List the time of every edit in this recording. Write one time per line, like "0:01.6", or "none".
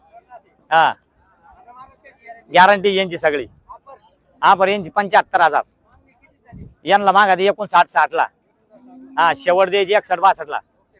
none

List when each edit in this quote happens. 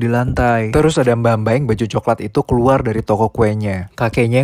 0:01.2

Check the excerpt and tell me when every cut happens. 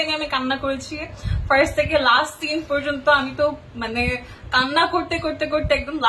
none

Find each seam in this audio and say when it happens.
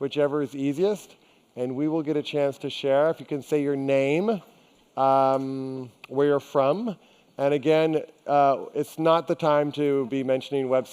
0:06.3

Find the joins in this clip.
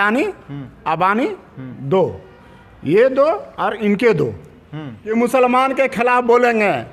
0:04.5

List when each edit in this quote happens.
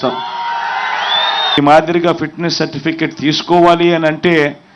0:01.6

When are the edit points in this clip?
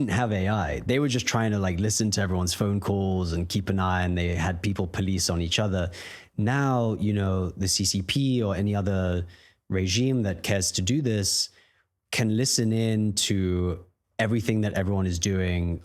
none

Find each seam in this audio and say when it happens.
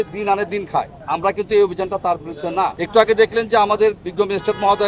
0:01.0
0:02.8

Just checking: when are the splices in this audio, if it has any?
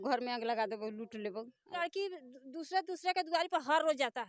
0:01.8

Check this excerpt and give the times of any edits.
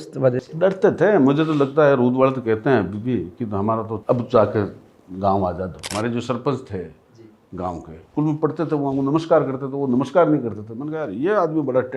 0:03.9
0:05.9
0:08.0

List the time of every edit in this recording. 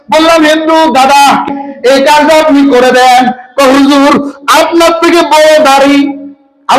0:01.5

